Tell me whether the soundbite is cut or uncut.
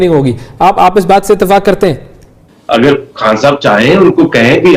cut